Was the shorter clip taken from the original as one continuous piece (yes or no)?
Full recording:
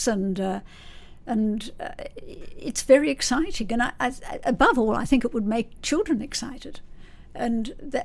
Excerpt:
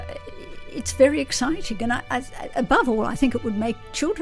yes